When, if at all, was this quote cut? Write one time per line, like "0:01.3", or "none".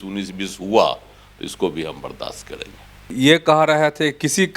0:03.1

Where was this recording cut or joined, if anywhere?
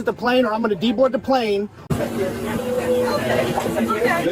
0:01.9

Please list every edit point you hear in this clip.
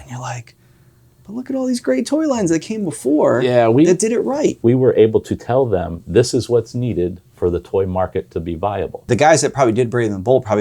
0:04.6
0:09.0

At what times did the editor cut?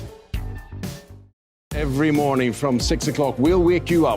0:01.5

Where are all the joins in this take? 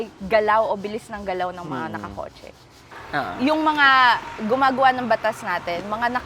0:03.0

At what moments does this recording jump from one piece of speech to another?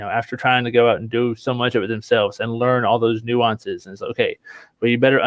none

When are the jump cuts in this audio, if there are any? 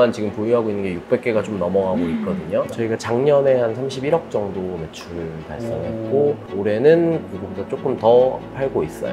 0:02.7
0:06.5

